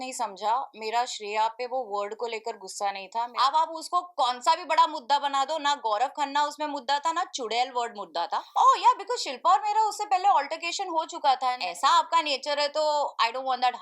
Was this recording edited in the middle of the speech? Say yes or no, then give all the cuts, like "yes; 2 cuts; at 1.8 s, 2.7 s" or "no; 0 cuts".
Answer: yes; 3 cuts; at 3.3 s, 8.5 s, 11.6 s